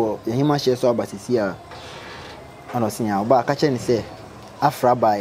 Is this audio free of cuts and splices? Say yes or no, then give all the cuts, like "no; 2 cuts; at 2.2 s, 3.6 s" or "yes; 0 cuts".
yes; 0 cuts